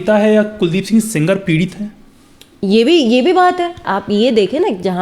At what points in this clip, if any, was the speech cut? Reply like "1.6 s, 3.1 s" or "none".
3.8 s